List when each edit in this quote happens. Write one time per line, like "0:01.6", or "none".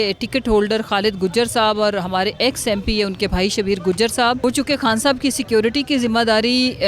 0:04.4